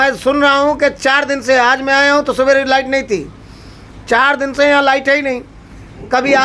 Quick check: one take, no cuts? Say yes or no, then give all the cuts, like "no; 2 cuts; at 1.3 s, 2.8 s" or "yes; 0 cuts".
yes; 0 cuts